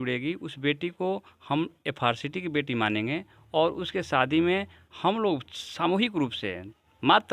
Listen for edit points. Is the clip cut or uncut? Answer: uncut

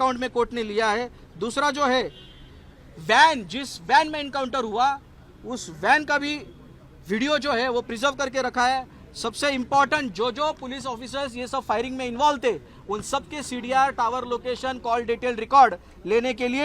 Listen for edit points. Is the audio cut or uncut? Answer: uncut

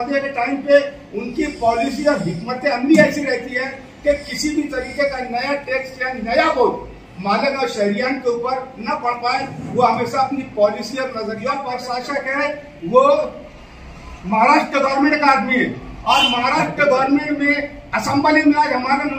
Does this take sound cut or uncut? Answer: cut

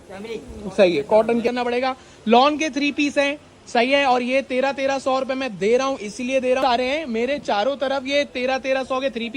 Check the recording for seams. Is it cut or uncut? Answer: cut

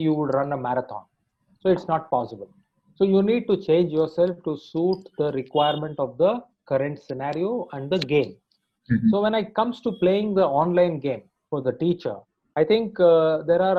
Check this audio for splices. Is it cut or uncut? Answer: uncut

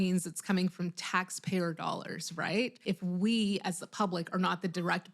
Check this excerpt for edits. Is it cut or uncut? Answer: cut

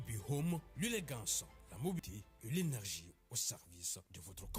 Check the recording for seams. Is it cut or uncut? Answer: cut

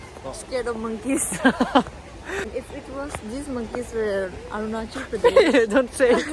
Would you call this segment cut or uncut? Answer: cut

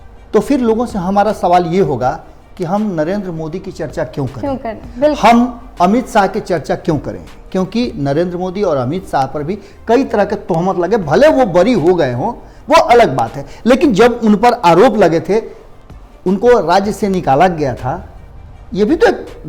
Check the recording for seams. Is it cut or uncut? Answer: uncut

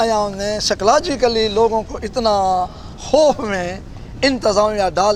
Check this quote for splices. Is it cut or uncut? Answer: uncut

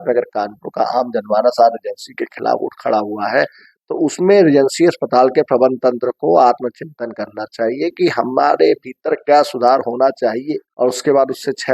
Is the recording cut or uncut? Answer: cut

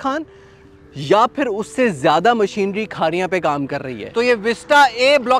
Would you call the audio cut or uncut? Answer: cut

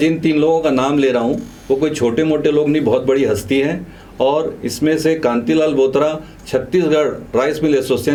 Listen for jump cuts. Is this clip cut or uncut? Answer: uncut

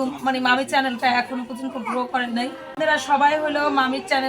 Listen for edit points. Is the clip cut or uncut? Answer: cut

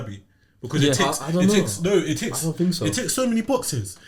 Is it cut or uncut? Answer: uncut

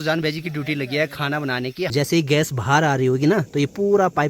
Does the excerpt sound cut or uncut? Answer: cut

